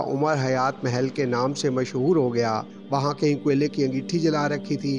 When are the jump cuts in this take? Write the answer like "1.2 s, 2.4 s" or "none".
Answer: 2.7 s